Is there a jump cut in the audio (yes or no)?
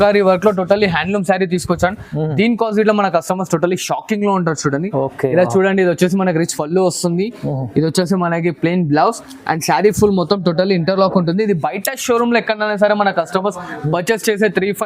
no